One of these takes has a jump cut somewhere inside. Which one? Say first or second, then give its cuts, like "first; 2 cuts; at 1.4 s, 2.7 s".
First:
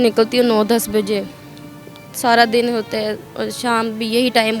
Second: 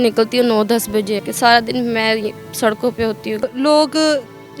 second; 2 cuts; at 1.3 s, 3.4 s